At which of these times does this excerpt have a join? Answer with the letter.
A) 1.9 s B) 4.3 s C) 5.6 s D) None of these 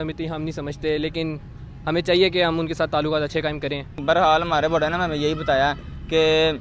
D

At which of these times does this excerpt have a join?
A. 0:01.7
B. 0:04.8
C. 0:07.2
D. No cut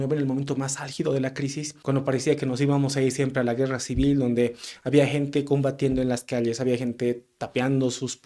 A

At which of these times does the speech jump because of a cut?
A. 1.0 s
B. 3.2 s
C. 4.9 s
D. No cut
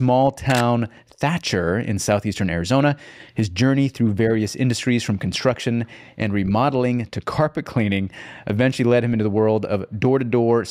D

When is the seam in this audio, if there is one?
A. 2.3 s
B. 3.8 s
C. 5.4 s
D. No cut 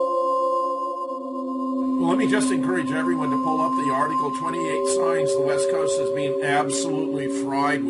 B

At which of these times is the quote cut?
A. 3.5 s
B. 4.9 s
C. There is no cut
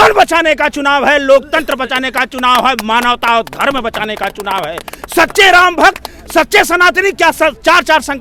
C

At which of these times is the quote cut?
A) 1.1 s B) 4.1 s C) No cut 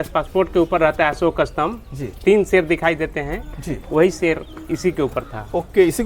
C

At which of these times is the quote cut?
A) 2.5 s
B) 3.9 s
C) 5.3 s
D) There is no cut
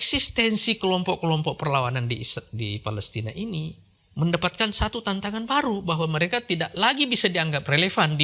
D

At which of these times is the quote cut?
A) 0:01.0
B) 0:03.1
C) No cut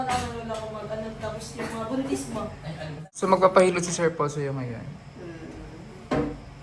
B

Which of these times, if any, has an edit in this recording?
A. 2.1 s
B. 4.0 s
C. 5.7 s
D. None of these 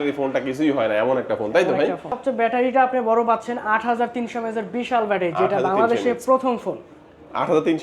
A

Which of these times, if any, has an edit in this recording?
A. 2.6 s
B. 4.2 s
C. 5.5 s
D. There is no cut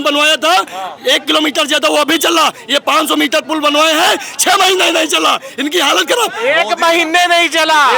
D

